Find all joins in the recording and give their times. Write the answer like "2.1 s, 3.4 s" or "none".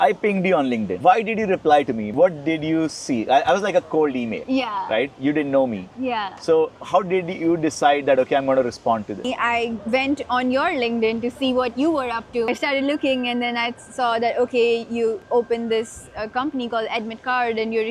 1.0 s, 9.2 s, 12.5 s, 15.2 s